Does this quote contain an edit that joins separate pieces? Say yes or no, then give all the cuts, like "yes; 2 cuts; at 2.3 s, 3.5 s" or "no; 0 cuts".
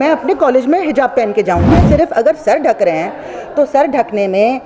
yes; 1 cut; at 1.8 s